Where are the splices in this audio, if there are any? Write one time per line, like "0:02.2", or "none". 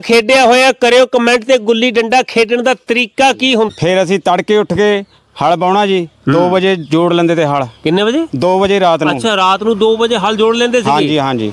0:03.7